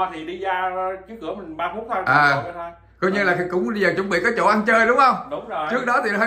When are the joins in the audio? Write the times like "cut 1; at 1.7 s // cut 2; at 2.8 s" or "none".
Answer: none